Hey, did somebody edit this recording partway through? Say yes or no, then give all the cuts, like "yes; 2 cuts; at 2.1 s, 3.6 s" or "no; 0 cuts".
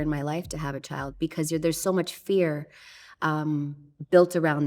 yes; 1 cut; at 1.1 s